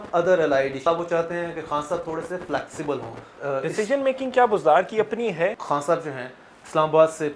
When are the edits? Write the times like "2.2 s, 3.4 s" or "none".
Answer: 0.9 s, 3.2 s, 5.6 s